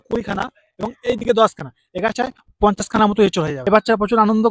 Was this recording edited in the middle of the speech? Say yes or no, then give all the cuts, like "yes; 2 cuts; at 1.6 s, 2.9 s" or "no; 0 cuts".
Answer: yes; 1 cut; at 3.5 s